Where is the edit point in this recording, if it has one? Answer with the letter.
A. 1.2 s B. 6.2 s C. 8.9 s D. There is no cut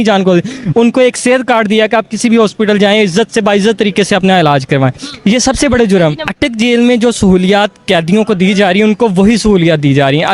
B